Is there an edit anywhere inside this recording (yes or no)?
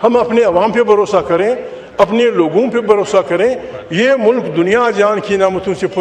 no